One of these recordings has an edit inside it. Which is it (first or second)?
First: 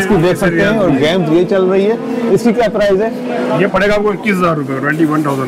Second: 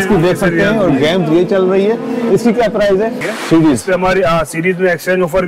second